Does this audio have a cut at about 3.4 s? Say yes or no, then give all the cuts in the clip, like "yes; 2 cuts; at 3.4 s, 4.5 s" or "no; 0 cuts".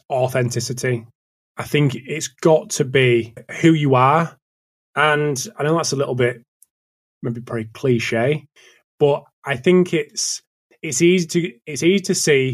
yes; 1 cut; at 3.4 s